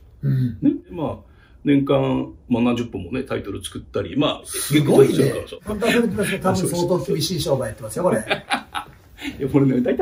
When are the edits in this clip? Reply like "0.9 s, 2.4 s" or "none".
0.9 s, 5.5 s